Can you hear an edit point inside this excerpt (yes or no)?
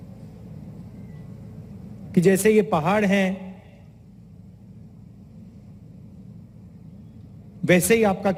no